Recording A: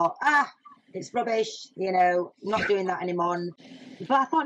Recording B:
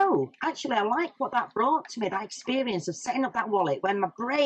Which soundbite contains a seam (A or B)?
A